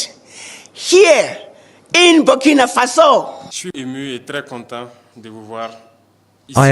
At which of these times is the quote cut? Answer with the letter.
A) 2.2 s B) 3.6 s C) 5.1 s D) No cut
B